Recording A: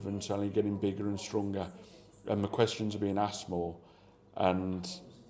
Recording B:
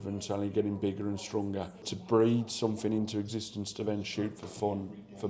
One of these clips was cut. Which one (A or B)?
B